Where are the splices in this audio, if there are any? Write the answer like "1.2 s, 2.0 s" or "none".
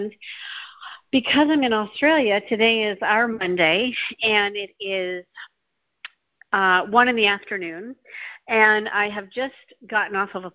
4.1 s